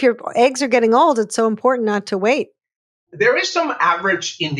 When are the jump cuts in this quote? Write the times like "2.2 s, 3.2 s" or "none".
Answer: 3.1 s